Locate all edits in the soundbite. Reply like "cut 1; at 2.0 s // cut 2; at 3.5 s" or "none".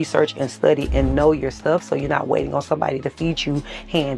none